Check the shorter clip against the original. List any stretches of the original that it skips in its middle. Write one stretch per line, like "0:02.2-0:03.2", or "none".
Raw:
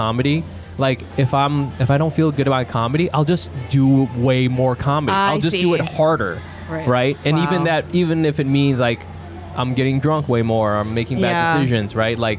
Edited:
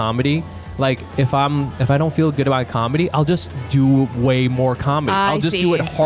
none